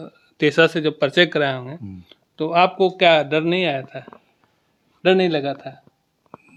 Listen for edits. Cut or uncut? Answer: uncut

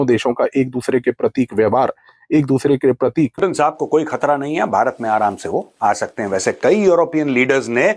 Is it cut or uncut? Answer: cut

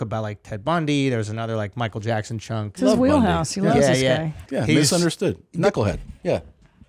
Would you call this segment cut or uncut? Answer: cut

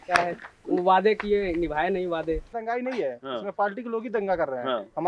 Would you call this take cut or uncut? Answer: cut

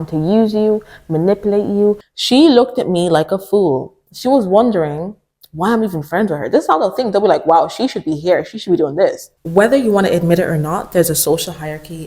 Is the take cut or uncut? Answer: cut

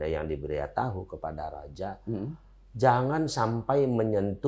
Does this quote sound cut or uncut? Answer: uncut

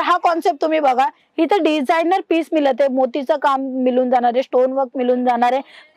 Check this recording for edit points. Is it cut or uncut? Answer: uncut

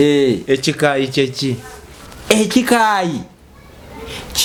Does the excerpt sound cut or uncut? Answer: uncut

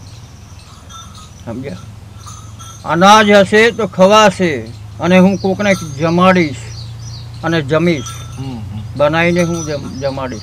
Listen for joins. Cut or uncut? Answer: uncut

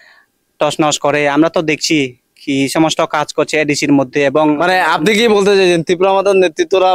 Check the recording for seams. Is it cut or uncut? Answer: uncut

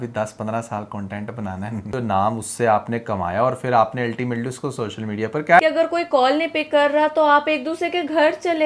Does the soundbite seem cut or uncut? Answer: cut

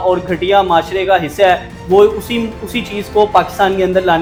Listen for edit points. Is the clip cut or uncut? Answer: uncut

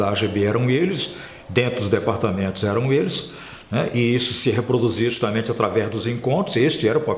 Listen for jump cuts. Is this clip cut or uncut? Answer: uncut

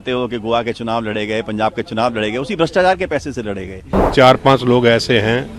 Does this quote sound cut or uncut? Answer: cut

